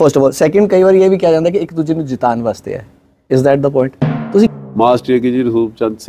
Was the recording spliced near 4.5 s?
yes; 1 cut; at 4.5 s

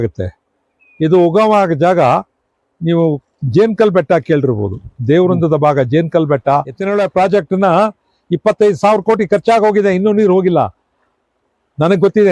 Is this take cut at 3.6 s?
no; 1 cut; at 6.8 s

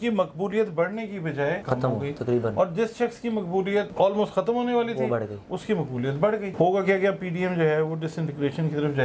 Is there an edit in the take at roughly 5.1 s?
no; 3 cuts; at 1.6 s, 3.9 s, 6.5 s

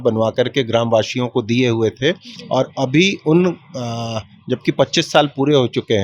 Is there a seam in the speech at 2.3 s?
no; 0 cuts

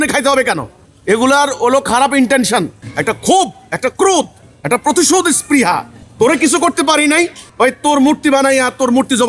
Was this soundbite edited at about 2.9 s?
yes; 2 cuts; at 2.9 s, 7.4 s

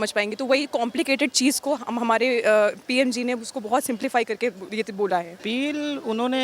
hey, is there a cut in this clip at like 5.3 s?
yes; 1 cut; at 5.3 s

